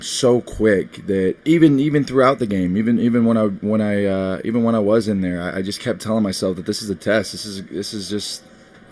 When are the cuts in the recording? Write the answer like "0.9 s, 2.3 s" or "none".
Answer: 1.4 s